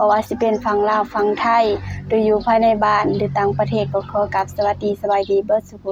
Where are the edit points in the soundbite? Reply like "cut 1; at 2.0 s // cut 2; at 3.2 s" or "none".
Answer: none